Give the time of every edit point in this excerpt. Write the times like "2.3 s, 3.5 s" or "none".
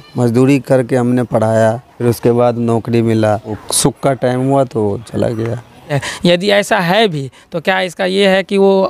1.9 s, 3.6 s, 6.1 s